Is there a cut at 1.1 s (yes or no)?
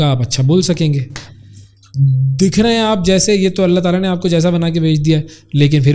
no